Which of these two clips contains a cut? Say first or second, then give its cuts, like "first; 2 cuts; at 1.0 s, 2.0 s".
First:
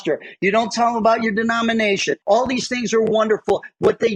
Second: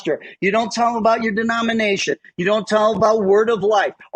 first; 1 cut; at 2.1 s